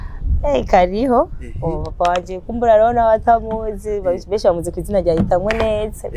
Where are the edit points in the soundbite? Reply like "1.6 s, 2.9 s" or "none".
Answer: none

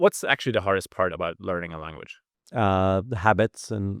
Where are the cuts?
none

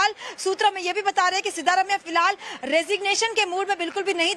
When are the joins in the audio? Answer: 1.6 s

